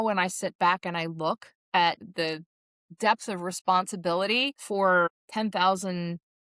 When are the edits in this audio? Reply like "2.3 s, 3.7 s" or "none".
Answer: 2.0 s, 4.6 s, 5.2 s